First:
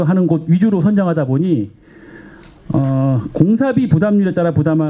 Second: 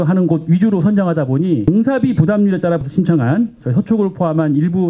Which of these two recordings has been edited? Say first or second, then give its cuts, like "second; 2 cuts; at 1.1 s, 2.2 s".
second; 2 cuts; at 1.7 s, 2.8 s